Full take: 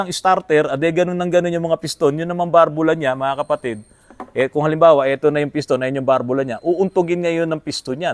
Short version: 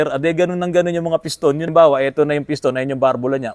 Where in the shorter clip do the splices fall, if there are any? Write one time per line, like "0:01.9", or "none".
0:01.7